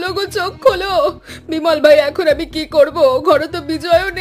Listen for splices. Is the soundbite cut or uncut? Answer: uncut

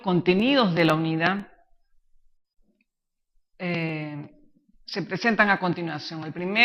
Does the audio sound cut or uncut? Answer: uncut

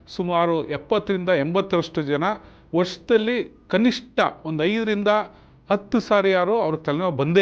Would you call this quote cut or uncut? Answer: uncut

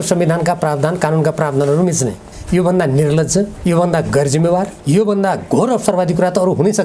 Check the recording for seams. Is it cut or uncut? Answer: cut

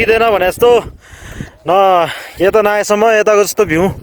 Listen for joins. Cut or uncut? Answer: uncut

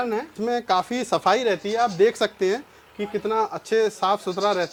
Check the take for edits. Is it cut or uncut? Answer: uncut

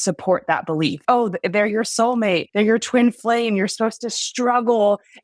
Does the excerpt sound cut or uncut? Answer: cut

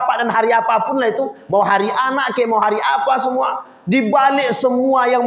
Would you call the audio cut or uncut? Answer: uncut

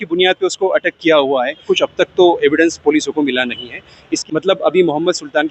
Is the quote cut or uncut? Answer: cut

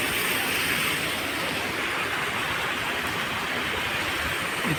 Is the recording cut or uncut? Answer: uncut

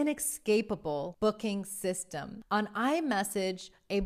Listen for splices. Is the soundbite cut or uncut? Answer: cut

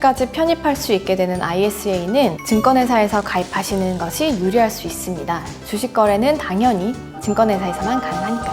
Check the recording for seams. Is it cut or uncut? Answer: uncut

